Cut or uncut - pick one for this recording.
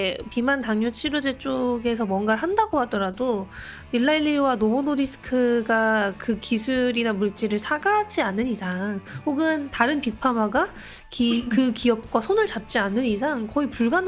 uncut